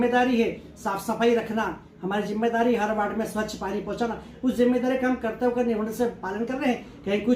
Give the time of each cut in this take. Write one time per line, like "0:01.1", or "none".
none